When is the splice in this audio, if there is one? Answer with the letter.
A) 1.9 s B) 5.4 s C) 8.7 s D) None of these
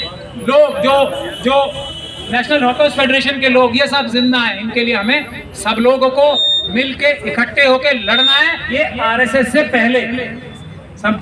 C